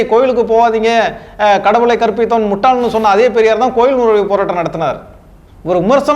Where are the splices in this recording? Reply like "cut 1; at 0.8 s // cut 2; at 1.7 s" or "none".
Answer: none